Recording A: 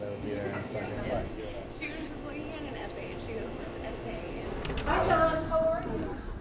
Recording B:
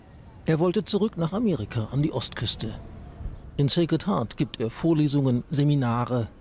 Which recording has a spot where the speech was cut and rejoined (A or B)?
A